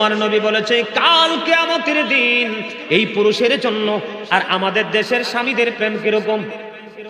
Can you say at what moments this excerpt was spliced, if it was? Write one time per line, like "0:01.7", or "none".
0:04.1